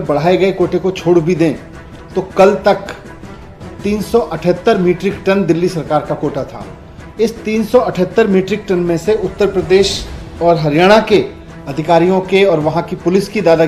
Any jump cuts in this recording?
no; 0 cuts

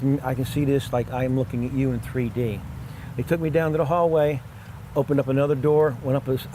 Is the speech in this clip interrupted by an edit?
no; 0 cuts

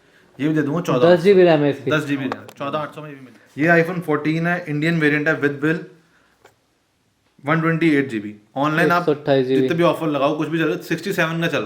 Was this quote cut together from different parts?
yes; 1 cut; at 3.0 s

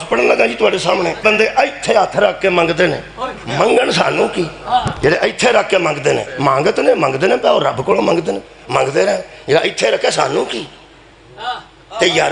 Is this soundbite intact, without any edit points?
no; 1 cut; at 1.2 s

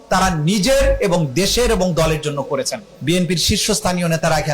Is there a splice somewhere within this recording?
yes; 1 cut; at 2.8 s

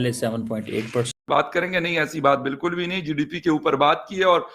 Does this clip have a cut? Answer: yes; 1 cut; at 1.1 s

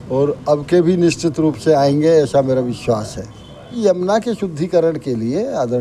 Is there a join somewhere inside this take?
yes; 1 cut; at 3.8 s

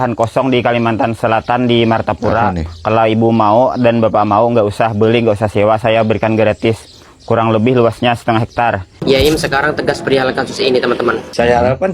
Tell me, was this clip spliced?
yes; 1 cut; at 8.9 s

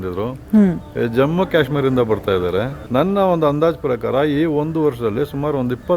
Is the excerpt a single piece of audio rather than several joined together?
no; 1 cut; at 2.8 s

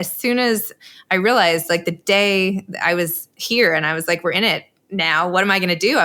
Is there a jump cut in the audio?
no; 0 cuts

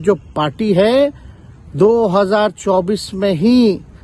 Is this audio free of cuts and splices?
yes; 0 cuts

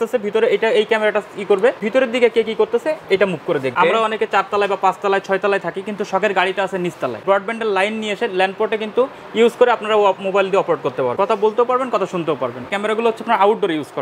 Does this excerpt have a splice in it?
yes; 5 cuts; at 1.8 s, 3.8 s, 7.2 s, 11.1 s, 12.7 s

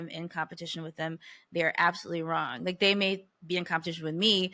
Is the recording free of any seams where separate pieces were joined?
yes; 0 cuts

